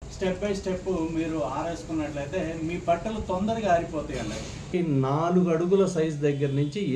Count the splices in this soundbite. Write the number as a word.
one